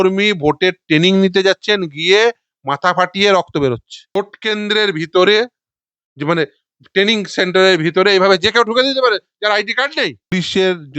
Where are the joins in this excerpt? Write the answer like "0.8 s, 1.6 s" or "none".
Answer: 4.1 s, 10.3 s